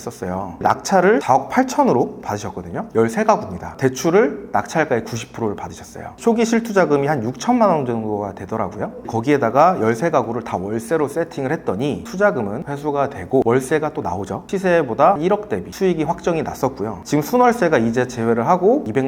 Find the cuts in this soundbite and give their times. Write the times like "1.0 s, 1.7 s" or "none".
1.2 s, 2.9 s, 6.1 s, 14.5 s